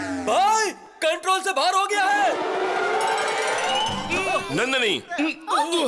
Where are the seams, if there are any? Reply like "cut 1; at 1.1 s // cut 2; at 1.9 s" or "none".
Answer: cut 1; at 4.0 s